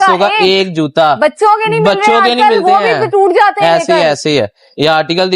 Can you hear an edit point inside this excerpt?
no; 0 cuts

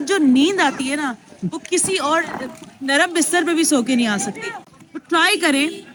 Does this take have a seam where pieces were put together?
no; 0 cuts

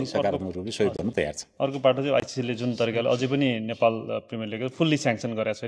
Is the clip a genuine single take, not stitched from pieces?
yes; 0 cuts

